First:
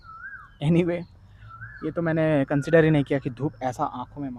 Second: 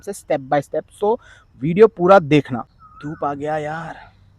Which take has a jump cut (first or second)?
second